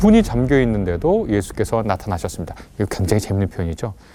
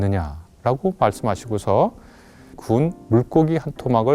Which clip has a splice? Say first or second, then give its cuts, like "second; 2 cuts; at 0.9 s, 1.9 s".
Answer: second; 1 cut; at 2.6 s